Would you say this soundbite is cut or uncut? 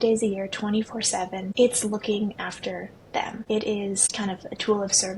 cut